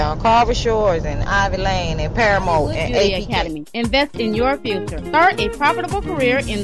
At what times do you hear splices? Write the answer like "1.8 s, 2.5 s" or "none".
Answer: 3.1 s